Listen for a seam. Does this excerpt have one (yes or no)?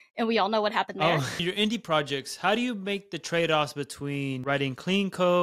yes